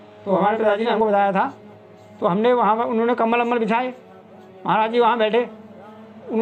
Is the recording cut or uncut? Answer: uncut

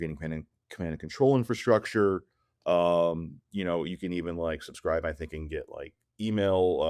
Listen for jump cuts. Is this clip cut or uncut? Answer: uncut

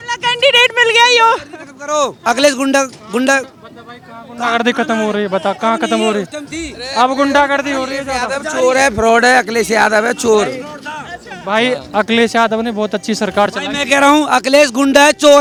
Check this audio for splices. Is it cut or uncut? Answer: uncut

